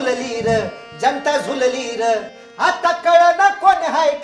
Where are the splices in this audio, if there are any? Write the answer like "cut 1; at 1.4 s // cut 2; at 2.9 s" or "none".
none